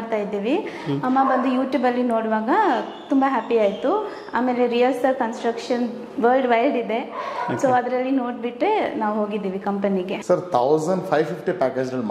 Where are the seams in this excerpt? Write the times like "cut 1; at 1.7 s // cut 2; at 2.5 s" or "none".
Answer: cut 1; at 10.2 s